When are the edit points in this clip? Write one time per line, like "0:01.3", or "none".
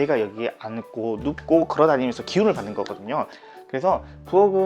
0:03.4